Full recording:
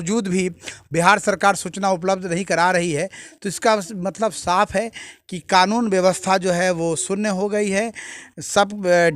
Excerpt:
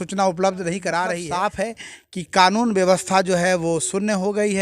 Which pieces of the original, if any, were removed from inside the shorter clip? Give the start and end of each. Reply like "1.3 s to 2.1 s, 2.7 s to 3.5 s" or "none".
2.9 s to 4.4 s